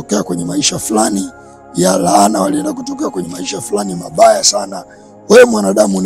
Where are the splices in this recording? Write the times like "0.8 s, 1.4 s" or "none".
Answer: none

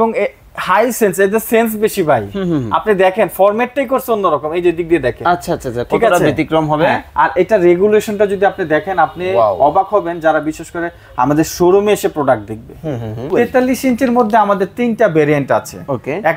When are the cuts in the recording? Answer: 13.3 s

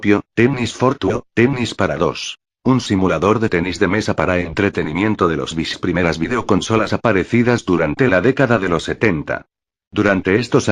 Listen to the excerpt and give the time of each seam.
none

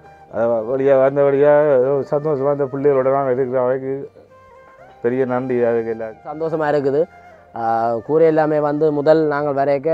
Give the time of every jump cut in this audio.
6.4 s

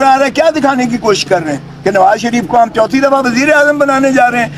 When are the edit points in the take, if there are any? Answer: none

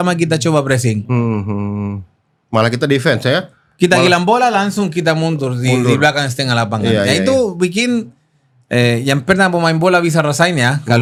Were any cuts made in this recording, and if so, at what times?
none

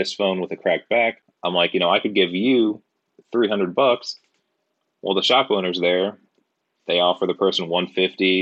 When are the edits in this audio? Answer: 1.3 s

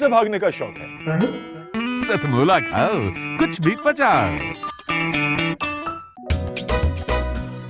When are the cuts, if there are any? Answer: none

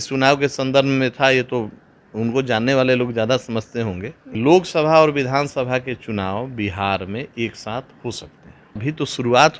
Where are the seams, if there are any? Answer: 4.2 s, 8.8 s

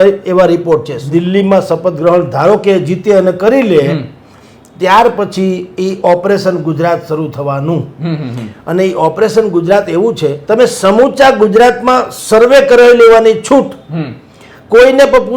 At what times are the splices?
1.0 s, 10.3 s

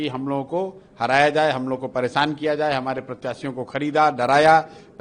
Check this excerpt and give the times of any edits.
none

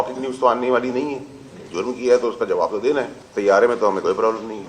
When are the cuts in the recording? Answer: 3.2 s

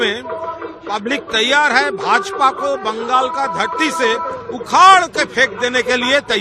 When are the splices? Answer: none

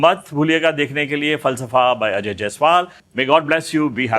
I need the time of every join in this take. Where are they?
3.0 s

